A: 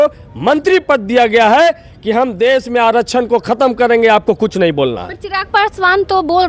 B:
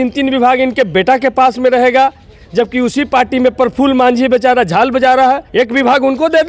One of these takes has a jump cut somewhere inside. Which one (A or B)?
B